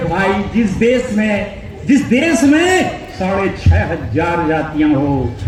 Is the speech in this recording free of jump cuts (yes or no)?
yes